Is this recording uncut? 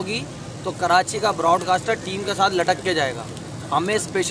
no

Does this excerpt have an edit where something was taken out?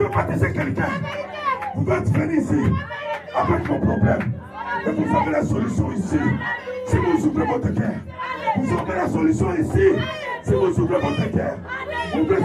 no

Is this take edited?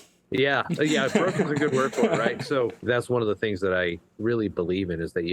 yes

